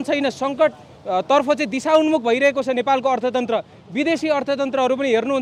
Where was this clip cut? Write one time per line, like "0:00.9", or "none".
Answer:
none